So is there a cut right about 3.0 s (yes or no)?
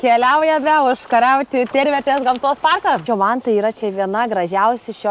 yes